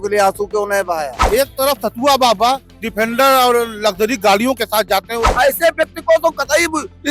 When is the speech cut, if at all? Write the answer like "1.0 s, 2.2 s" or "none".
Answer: 1.2 s, 5.3 s